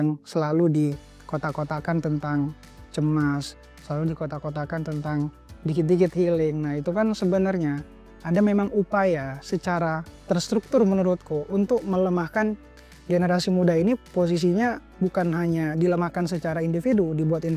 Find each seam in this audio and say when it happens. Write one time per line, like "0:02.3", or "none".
none